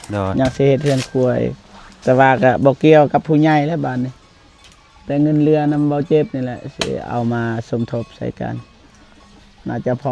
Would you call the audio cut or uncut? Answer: uncut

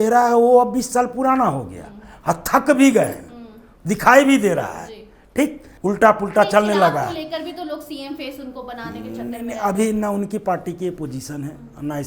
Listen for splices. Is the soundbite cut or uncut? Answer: cut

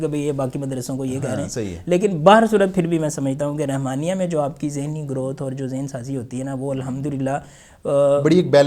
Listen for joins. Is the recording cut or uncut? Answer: uncut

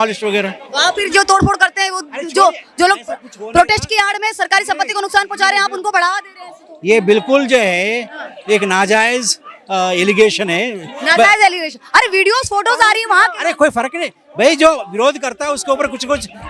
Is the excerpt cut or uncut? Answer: uncut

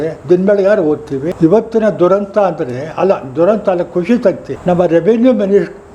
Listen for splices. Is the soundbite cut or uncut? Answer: cut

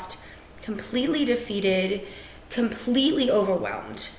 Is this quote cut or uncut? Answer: uncut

